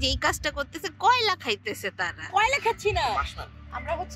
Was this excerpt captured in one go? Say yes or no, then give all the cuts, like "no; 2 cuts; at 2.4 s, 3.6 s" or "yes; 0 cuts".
yes; 0 cuts